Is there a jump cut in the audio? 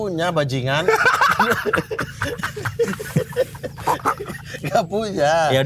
no; 0 cuts

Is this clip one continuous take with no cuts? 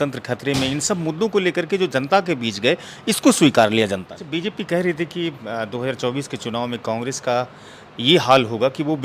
no; 1 cut; at 4.1 s

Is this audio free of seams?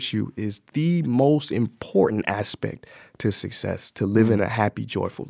yes; 0 cuts

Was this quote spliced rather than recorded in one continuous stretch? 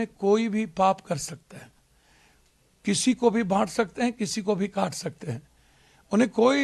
no; 0 cuts

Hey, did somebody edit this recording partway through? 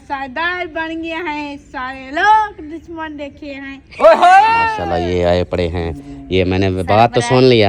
yes; 1 cut; at 4.8 s

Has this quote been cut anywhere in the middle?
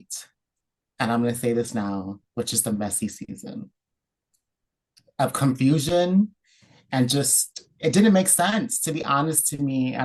no; 0 cuts

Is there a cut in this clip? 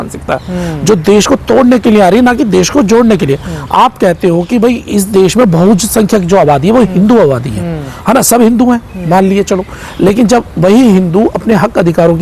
no; 0 cuts

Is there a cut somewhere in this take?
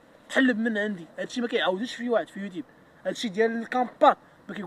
no; 0 cuts

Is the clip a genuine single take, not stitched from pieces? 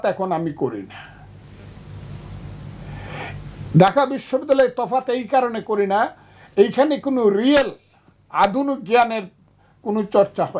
yes; 0 cuts

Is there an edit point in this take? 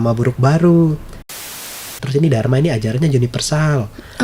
yes; 1 cut; at 1.4 s

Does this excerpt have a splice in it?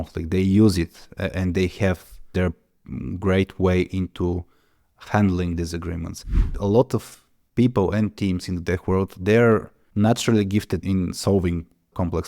yes; 1 cut; at 6.5 s

